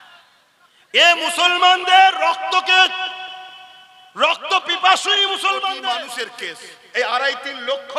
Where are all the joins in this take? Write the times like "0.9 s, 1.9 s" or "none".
6.0 s

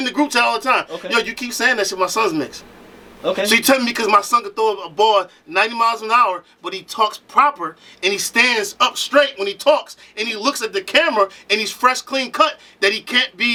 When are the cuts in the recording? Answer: none

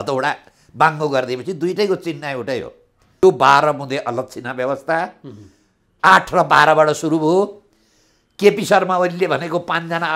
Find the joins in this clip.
3.2 s

